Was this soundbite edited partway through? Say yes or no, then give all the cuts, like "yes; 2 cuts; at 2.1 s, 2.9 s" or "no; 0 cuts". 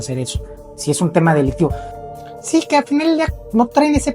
yes; 1 cut; at 1.9 s